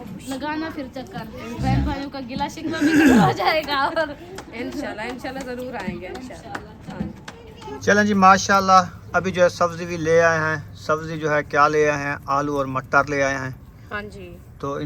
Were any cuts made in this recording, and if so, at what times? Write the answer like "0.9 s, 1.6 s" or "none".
none